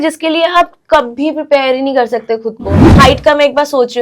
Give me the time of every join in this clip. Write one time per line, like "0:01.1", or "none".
0:02.8